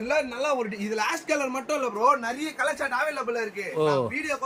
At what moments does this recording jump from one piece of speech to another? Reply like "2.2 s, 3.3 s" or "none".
none